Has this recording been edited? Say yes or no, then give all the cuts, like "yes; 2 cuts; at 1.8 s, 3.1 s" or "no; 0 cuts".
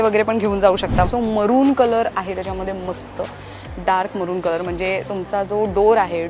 yes; 1 cut; at 1.1 s